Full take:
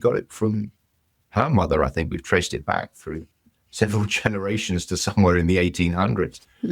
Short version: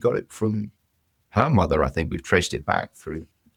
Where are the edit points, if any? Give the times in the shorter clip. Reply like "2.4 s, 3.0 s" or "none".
none